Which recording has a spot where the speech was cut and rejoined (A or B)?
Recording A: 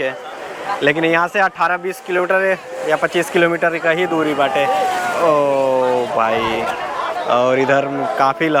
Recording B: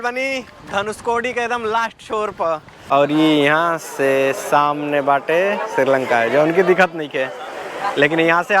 B